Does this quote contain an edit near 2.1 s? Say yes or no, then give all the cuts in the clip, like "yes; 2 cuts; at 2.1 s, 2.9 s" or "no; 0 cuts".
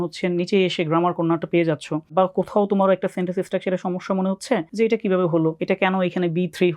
yes; 3 cuts; at 2.1 s, 4.7 s, 5.6 s